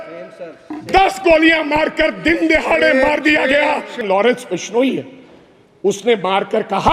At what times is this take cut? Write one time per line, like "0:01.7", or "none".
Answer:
0:04.0

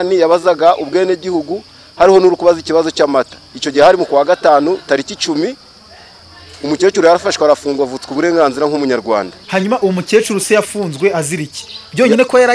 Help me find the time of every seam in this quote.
0:09.4

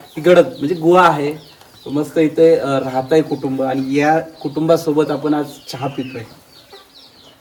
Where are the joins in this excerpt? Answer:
none

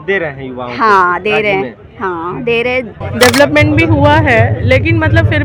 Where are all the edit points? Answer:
0:03.0

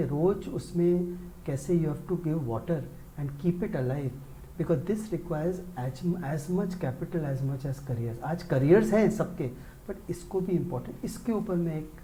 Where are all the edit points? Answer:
none

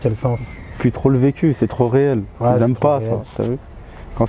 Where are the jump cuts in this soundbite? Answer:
none

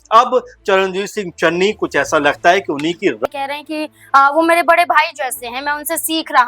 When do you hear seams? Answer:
0:03.2

